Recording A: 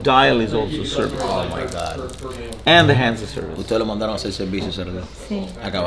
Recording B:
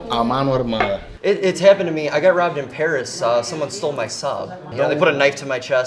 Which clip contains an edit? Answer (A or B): B